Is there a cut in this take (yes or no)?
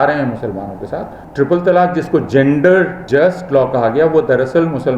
yes